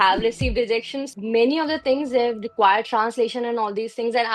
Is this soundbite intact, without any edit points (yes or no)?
no